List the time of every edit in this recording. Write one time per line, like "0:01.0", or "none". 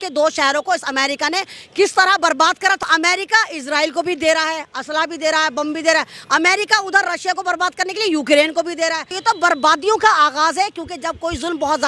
0:02.8
0:09.1